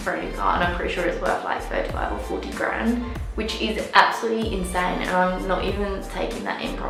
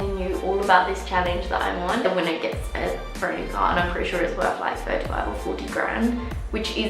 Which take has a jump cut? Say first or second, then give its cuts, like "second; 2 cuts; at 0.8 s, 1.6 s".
second; 1 cut; at 2.0 s